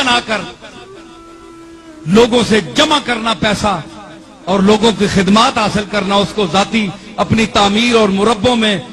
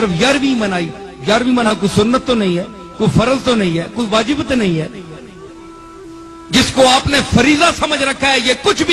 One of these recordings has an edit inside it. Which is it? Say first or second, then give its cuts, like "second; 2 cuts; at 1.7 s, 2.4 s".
second; 1 cut; at 1.7 s